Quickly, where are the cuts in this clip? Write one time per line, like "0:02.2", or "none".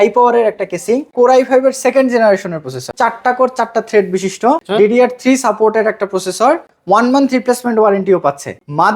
0:01.1
0:02.9
0:04.6